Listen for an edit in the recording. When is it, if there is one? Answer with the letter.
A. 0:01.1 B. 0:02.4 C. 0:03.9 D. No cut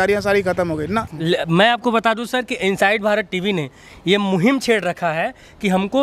A